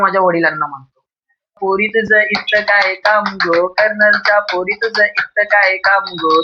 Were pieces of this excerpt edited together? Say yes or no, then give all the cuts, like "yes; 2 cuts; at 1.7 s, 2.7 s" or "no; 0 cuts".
yes; 1 cut; at 1.6 s